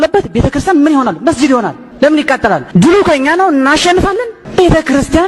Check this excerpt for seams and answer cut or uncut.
cut